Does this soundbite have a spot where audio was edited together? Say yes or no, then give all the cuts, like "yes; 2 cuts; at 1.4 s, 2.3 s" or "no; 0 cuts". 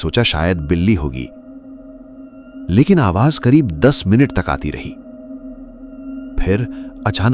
yes; 2 cuts; at 5.0 s, 6.4 s